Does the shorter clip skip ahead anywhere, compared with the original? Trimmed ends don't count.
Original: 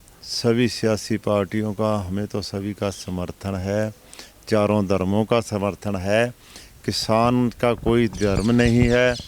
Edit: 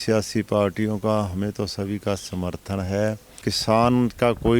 yes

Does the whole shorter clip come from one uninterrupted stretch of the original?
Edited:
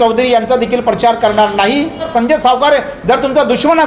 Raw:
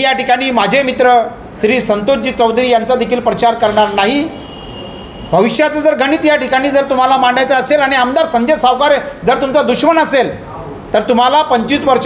no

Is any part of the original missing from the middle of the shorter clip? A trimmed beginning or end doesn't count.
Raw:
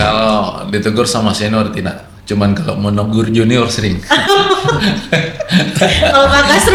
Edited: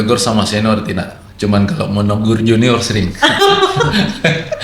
no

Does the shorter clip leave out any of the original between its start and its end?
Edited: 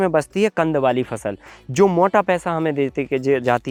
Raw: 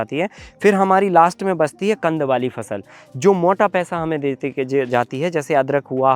no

